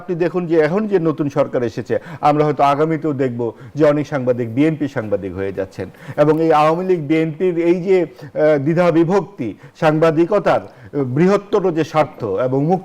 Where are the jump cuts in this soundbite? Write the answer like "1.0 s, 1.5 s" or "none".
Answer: none